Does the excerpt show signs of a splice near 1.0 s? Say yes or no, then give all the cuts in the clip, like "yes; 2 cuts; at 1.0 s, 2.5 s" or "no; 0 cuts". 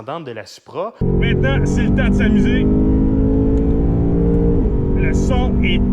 yes; 1 cut; at 1.0 s